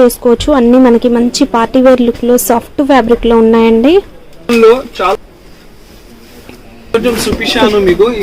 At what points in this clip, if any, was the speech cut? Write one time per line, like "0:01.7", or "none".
0:05.1